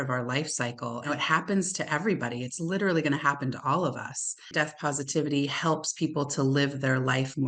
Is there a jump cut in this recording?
yes; 2 cuts; at 1.1 s, 4.5 s

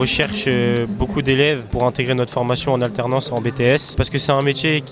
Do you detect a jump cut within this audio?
yes; 2 cuts; at 1.7 s, 4.0 s

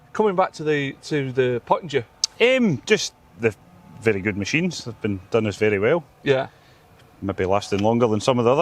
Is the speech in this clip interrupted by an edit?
no; 0 cuts

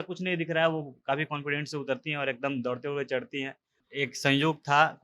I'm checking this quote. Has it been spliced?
yes; 1 cut; at 3.8 s

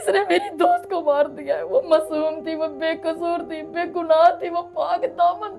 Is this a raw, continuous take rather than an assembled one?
yes; 0 cuts

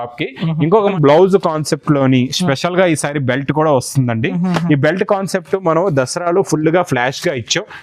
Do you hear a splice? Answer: yes; 1 cut; at 0.9 s

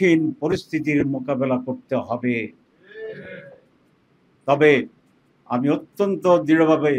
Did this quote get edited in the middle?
no; 0 cuts

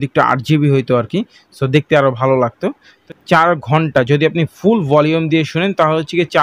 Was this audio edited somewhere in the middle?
yes; 1 cut; at 3.0 s

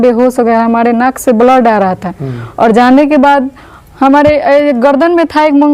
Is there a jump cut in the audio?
no; 0 cuts

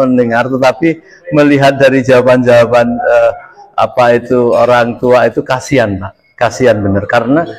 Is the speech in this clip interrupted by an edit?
no; 0 cuts

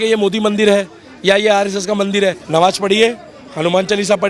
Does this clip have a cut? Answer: yes; 1 cut; at 2.4 s

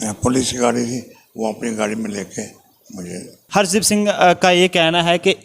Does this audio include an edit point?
yes; 1 cut; at 3.4 s

